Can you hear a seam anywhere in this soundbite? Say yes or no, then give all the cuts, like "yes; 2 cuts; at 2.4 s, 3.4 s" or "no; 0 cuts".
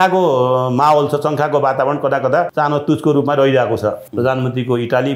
yes; 2 cuts; at 2.5 s, 4.1 s